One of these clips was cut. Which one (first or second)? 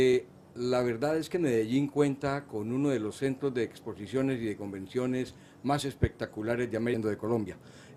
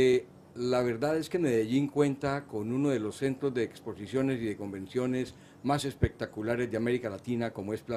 second